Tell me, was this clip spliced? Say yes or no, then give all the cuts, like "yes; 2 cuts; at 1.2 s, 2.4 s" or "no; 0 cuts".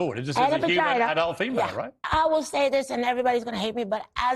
yes; 1 cut; at 2.1 s